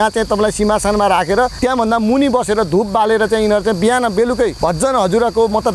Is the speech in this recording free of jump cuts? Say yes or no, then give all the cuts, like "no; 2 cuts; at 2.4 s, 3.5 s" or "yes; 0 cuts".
no; 2 cuts; at 1.5 s, 4.6 s